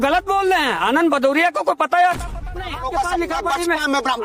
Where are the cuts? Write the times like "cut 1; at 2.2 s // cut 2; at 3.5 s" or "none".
cut 1; at 2.2 s